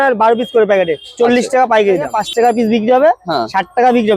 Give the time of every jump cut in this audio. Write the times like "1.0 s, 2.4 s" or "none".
2.2 s